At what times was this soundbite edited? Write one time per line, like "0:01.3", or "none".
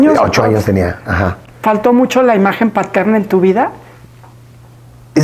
none